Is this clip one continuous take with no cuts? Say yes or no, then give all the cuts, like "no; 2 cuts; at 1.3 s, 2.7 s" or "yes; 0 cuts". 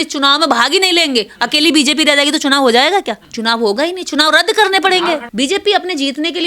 no; 2 cuts; at 3.2 s, 5.3 s